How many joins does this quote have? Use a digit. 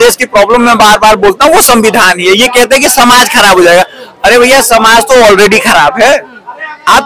0